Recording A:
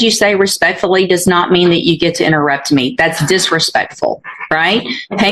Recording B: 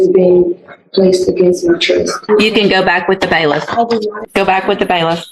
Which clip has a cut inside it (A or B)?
B